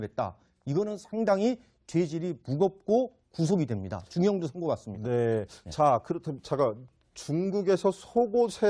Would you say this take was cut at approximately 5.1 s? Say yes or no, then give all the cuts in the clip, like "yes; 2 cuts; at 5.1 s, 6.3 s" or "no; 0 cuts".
no; 1 cut; at 2.6 s